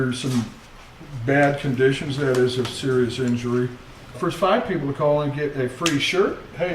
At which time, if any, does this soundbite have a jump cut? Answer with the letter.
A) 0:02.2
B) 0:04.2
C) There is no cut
B